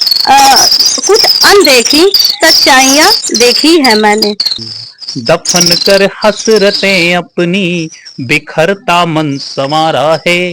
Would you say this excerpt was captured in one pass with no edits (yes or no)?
no